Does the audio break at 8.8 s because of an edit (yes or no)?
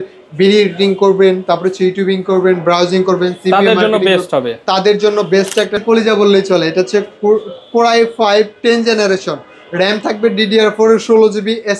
no